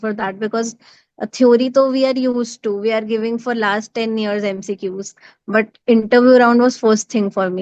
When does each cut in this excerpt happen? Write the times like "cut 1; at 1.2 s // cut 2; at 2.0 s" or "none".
none